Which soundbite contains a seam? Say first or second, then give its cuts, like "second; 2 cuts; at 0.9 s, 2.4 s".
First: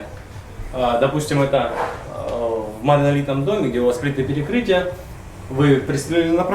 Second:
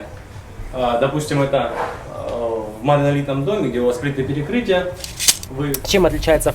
second; 1 cut; at 5.6 s